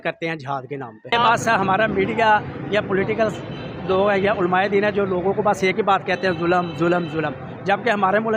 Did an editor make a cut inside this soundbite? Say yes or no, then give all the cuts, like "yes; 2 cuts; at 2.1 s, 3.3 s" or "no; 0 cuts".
yes; 1 cut; at 1.1 s